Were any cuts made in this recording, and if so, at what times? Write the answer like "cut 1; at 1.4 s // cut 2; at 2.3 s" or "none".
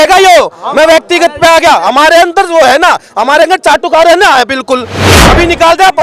cut 1; at 5.1 s